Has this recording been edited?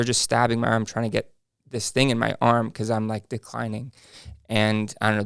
no; 0 cuts

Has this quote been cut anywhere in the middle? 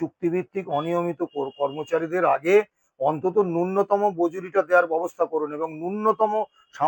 no; 0 cuts

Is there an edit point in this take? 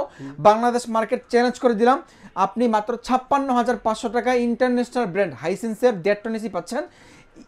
no; 0 cuts

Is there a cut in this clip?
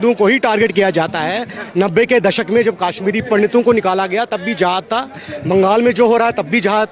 no; 0 cuts

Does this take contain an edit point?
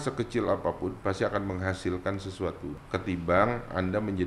yes; 1 cut; at 2.8 s

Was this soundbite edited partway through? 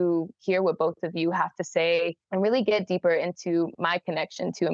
yes; 1 cut; at 2.2 s

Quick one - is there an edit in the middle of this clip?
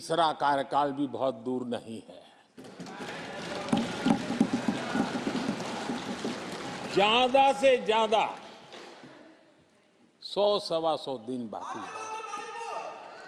no; 0 cuts

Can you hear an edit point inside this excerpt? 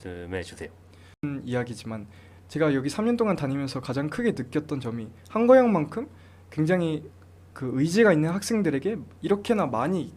yes; 1 cut; at 1.2 s

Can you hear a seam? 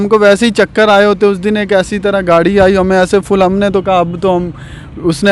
no; 0 cuts

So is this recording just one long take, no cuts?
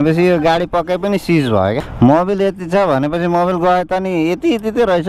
no; 1 cut; at 1.9 s

